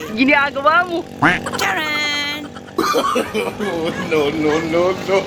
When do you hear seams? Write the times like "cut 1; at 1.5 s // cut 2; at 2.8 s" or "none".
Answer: none